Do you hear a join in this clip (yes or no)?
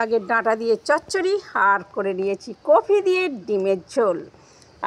no